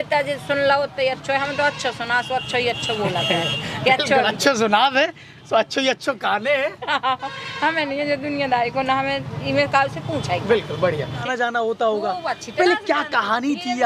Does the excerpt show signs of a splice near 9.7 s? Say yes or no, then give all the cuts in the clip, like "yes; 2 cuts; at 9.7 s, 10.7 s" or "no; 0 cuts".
no; 1 cut; at 11.2 s